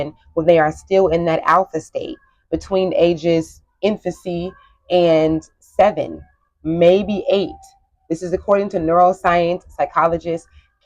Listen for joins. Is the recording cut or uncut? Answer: uncut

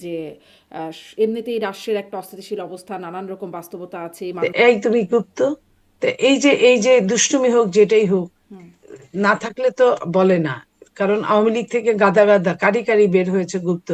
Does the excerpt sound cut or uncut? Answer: cut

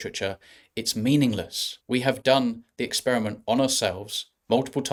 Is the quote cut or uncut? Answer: uncut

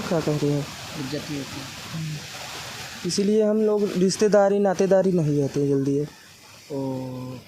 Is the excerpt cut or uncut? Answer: uncut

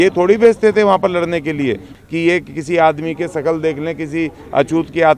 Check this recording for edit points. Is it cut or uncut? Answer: cut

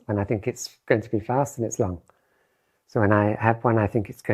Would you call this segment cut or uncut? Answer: uncut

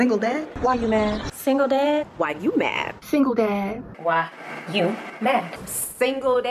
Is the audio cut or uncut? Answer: uncut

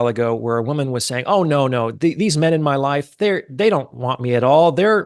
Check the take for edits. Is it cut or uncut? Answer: uncut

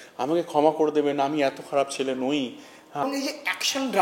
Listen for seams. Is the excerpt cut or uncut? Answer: cut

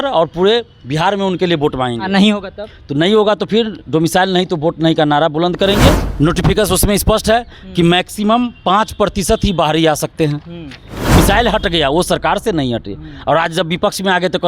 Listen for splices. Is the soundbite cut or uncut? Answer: cut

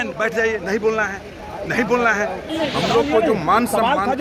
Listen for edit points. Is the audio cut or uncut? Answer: cut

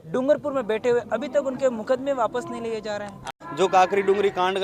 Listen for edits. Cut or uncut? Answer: cut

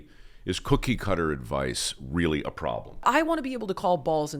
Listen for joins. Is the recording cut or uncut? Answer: cut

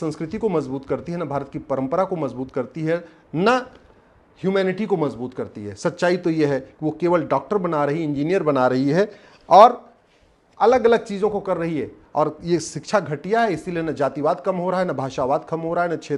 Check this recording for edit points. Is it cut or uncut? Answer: uncut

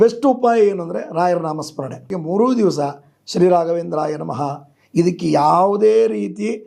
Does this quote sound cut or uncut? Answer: cut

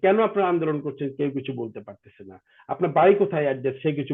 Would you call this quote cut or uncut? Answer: uncut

